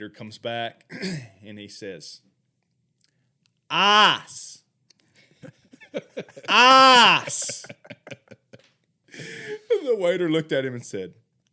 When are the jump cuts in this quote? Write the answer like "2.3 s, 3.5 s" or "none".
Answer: 9.0 s